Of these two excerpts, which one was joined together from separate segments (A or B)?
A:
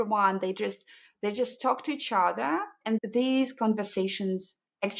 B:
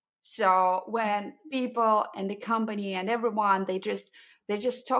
A